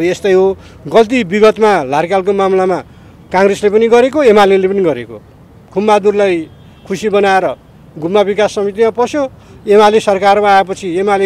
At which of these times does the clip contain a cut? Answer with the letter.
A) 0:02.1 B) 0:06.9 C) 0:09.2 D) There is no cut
D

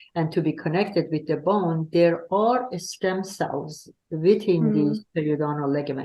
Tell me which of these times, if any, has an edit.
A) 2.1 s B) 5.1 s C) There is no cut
C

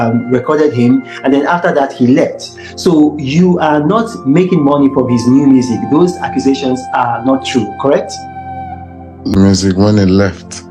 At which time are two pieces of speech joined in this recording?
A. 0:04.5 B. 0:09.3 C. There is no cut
B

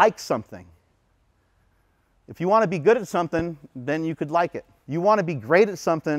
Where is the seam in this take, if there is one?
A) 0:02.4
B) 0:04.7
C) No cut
B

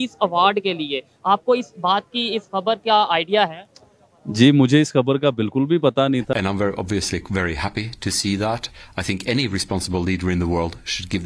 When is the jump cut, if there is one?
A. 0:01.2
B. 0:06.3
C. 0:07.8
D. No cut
B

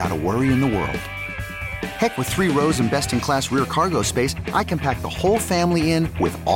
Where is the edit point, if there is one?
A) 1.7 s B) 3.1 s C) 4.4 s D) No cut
D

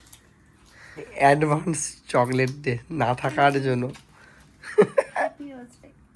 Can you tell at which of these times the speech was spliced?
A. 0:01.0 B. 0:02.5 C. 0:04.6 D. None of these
A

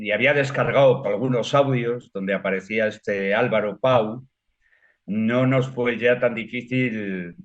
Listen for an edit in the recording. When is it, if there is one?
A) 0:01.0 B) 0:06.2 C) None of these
A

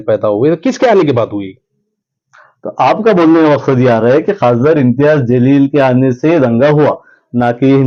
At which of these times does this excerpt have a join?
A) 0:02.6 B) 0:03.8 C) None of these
C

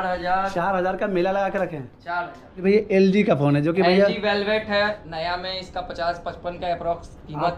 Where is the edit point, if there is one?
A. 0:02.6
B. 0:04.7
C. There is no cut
A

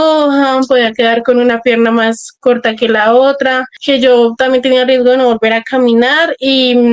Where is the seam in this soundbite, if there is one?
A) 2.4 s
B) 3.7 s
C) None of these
B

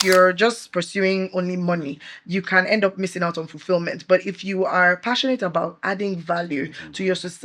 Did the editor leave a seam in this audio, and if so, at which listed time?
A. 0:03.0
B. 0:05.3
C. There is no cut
C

